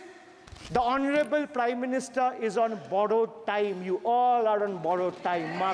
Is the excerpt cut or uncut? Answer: uncut